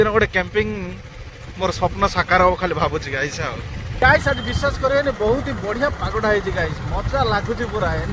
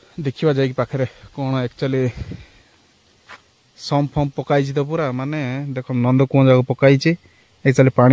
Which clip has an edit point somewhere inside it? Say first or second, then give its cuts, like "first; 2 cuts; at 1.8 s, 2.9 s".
first; 1 cut; at 4.0 s